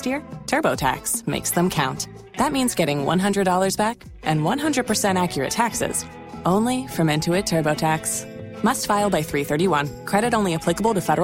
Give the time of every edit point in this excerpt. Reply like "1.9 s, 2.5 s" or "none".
none